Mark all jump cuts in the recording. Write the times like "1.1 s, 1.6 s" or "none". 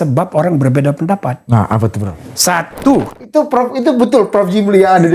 3.2 s

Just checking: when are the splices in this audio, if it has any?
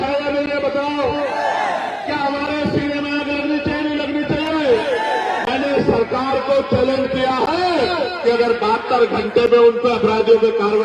none

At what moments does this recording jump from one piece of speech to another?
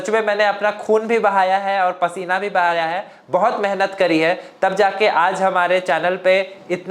none

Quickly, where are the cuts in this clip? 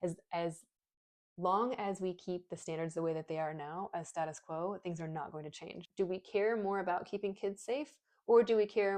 5.8 s

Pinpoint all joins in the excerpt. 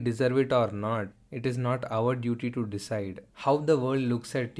3.2 s

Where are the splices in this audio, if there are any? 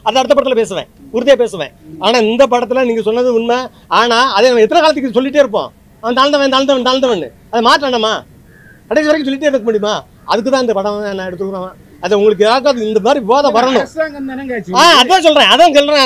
none

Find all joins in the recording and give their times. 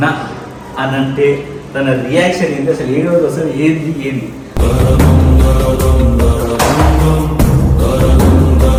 none

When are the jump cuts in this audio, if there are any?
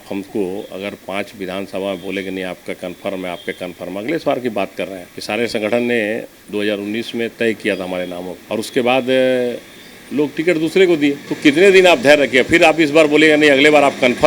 none

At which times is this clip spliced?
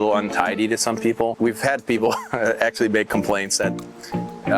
1.3 s

